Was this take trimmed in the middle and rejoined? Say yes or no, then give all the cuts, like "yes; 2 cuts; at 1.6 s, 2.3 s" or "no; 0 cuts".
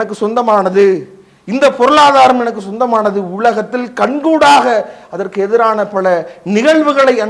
no; 0 cuts